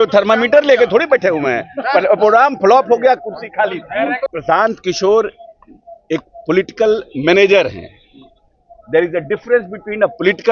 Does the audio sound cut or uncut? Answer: cut